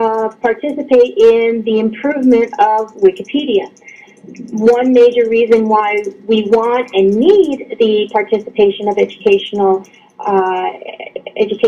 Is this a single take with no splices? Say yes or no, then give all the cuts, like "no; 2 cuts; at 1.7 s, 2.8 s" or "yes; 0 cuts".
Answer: no; 1 cut; at 4.4 s